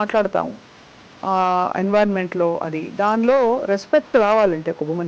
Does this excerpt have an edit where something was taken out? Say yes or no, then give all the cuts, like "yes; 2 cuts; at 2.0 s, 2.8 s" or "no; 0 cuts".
no; 0 cuts